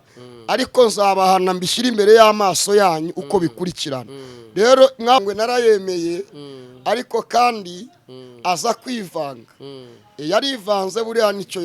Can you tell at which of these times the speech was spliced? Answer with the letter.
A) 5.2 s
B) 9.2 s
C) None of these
A